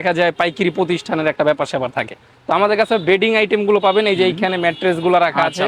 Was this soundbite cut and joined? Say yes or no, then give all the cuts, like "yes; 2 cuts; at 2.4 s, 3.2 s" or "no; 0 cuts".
no; 0 cuts